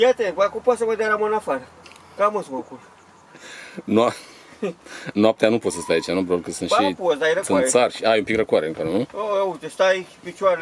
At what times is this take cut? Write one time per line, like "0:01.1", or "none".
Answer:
none